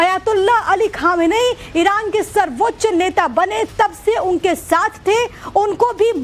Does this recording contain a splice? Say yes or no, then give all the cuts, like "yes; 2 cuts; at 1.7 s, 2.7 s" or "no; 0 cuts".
yes; 1 cut; at 1.1 s